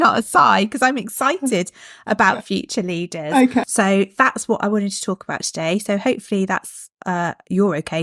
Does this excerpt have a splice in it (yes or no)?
yes